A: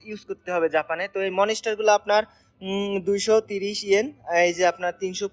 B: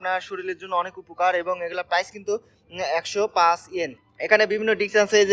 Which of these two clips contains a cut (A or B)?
B